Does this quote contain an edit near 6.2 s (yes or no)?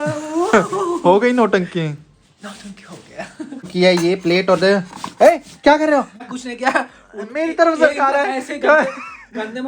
yes